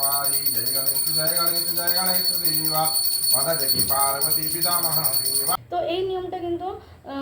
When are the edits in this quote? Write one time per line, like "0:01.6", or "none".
0:05.6